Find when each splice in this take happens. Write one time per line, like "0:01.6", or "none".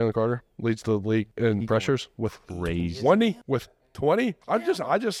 0:01.3
0:03.4
0:04.4